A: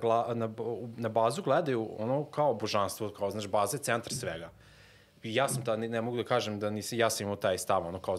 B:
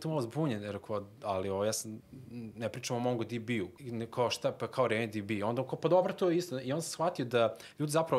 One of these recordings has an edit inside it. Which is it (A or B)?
B